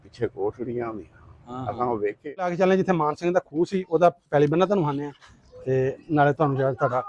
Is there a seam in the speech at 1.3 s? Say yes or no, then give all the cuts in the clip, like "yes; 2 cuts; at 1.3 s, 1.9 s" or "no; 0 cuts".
no; 1 cut; at 2.5 s